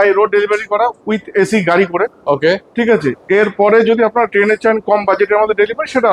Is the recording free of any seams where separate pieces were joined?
yes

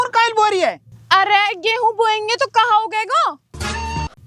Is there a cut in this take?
no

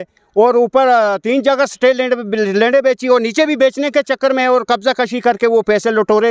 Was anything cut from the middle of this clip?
no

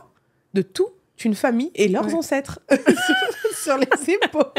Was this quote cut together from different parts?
no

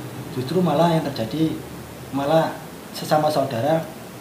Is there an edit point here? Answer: no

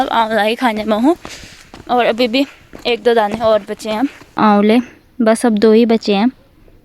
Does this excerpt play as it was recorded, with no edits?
no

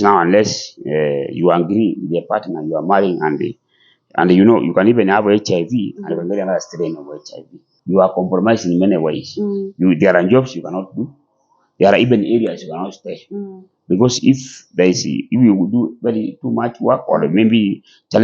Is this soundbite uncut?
no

